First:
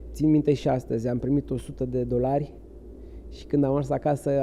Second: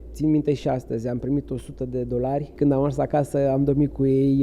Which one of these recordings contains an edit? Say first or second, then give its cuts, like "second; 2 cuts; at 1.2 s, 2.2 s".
second; 1 cut; at 2.5 s